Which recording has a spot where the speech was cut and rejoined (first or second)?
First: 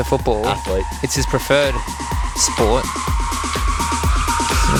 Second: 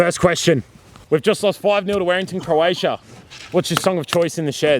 second